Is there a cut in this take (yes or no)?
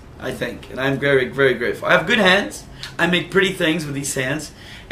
no